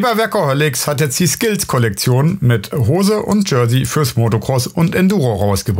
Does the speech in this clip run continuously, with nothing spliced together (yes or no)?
yes